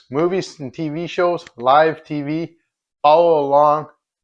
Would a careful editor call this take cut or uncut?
uncut